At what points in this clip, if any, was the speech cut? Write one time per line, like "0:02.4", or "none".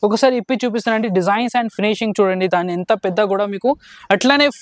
none